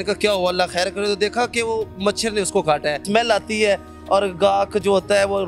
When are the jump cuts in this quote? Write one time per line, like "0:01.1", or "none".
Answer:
0:03.0